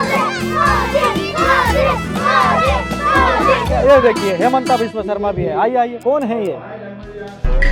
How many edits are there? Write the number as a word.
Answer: zero